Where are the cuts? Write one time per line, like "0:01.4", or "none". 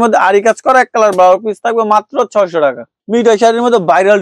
0:02.9